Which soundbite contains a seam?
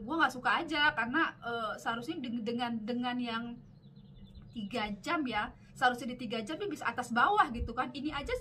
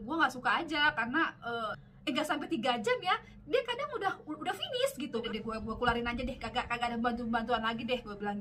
second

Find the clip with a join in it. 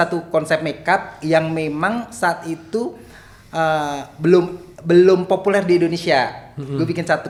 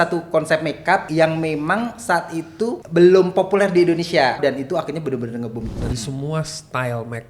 second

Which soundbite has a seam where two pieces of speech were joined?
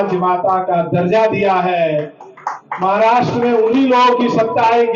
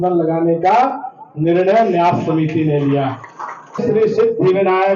second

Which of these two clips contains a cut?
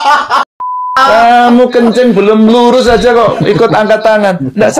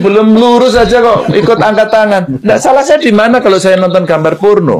first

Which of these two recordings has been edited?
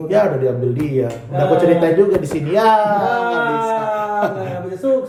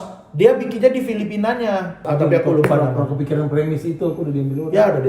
second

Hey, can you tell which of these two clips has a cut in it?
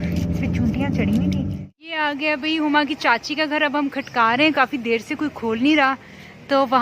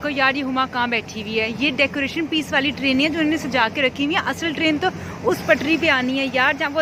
first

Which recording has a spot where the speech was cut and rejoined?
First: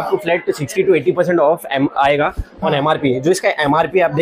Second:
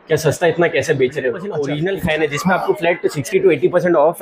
second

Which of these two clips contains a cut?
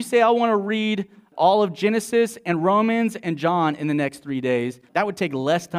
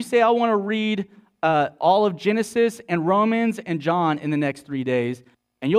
first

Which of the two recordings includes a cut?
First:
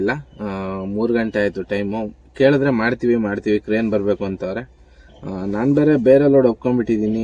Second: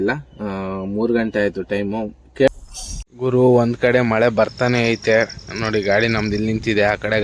second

